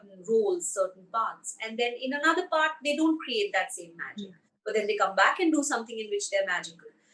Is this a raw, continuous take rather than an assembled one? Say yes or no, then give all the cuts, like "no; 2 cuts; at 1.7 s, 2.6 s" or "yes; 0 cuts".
yes; 0 cuts